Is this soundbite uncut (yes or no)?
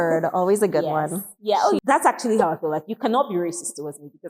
no